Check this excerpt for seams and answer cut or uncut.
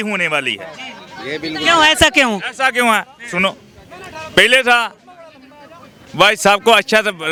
uncut